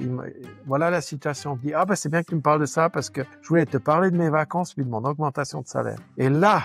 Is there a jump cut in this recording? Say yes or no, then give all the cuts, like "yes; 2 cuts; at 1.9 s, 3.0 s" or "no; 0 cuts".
no; 0 cuts